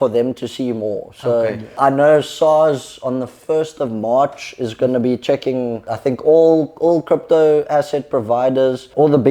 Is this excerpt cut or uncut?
cut